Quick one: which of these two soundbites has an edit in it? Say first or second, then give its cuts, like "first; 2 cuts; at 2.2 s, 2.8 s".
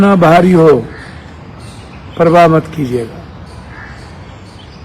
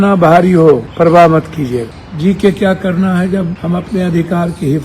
second; 3 cuts; at 0.9 s, 2.0 s, 3.6 s